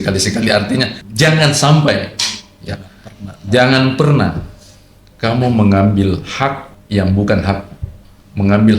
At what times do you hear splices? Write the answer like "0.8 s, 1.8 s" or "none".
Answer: 1.0 s, 6.7 s